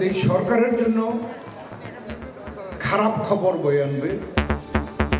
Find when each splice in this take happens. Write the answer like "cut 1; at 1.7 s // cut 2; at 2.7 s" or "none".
cut 1; at 4.3 s